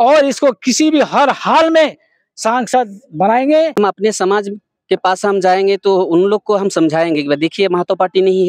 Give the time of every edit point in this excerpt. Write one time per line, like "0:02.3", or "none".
0:03.7